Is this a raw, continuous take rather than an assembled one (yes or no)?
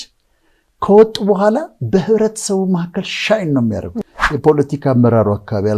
no